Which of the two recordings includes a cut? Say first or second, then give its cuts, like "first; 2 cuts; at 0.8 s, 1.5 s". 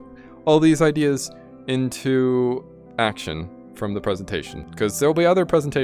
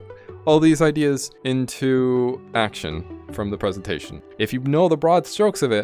second; 3 cuts; at 1.3 s, 2.4 s, 4.3 s